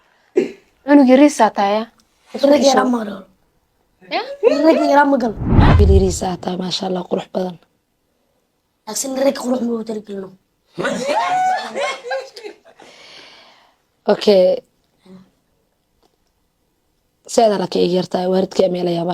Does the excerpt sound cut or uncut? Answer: cut